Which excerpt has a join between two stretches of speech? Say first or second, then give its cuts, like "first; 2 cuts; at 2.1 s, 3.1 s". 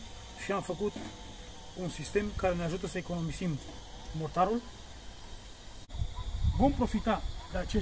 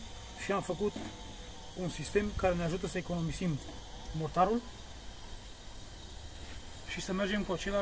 first; 1 cut; at 6.0 s